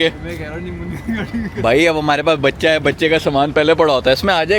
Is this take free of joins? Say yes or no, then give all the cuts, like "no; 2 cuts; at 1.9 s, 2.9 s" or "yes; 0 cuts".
yes; 0 cuts